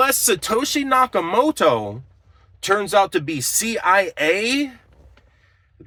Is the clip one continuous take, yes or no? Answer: yes